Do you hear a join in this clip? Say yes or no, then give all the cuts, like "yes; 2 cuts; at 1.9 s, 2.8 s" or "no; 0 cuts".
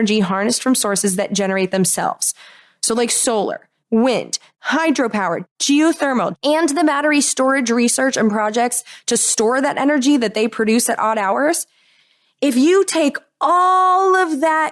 yes; 4 cuts; at 3.7 s, 4.5 s, 5.4 s, 6.3 s